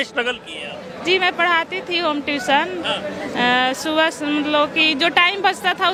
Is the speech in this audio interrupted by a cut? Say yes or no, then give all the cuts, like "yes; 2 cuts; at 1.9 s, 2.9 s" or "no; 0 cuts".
no; 0 cuts